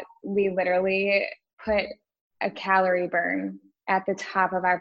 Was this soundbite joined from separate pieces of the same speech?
yes; 1 cut; at 1.4 s

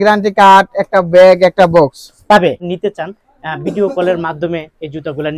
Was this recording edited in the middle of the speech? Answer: yes; 1 cut; at 2.6 s

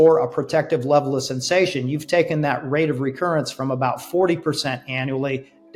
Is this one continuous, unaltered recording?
yes; 0 cuts

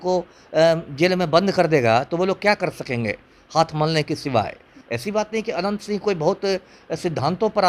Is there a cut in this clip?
yes; 1 cut; at 4.8 s

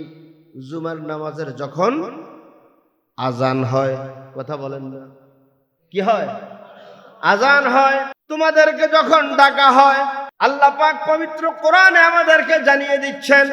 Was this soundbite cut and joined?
yes; 2 cuts; at 8.2 s, 10.3 s

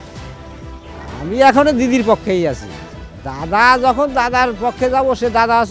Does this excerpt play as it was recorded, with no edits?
yes; 0 cuts

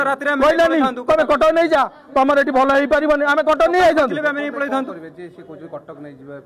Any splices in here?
no; 0 cuts

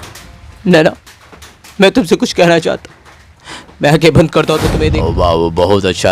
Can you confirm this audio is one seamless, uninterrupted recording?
no; 1 cut; at 4.8 s

